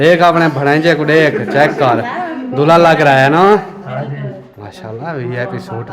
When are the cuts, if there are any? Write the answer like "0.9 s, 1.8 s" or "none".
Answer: none